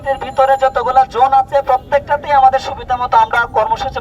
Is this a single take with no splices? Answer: yes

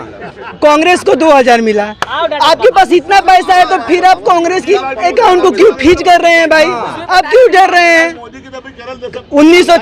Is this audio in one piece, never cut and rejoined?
yes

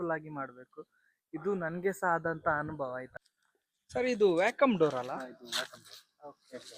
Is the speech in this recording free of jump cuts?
yes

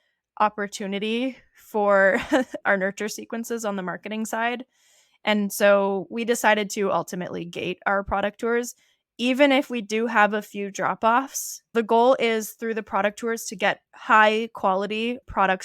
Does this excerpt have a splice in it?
yes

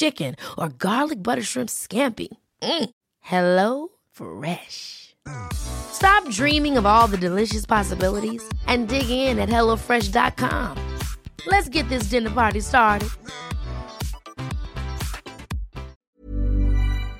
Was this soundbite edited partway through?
yes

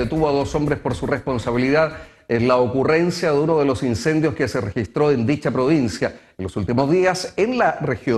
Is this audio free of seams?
yes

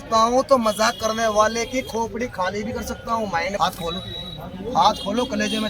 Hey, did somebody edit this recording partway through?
yes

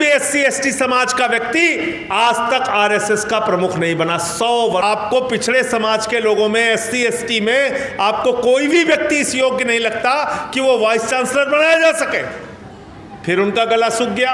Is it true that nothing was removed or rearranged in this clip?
no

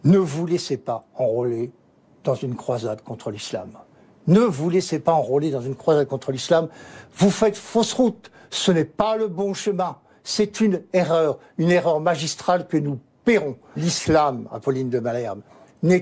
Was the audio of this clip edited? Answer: yes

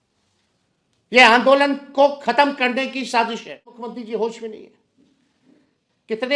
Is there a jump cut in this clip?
yes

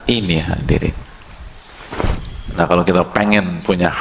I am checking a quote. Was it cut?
yes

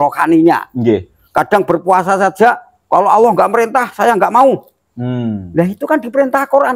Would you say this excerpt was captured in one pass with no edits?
yes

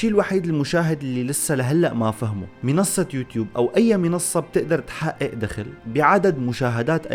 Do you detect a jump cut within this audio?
no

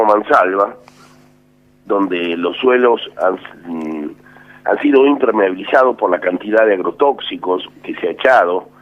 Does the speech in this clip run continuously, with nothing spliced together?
yes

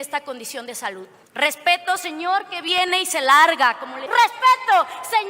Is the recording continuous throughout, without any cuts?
no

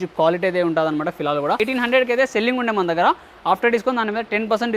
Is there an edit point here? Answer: yes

